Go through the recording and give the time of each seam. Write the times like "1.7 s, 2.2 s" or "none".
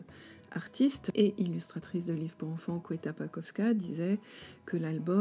1.0 s